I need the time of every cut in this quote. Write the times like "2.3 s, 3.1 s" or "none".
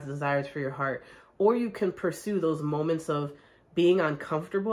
none